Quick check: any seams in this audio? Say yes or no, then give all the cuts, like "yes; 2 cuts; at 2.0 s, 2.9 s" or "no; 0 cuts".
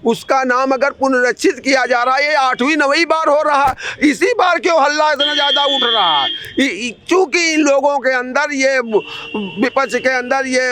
no; 0 cuts